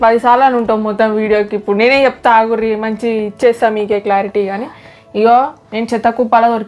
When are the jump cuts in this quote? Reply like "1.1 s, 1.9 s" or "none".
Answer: none